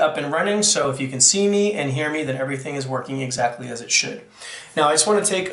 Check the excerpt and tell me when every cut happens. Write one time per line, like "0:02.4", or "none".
0:02.4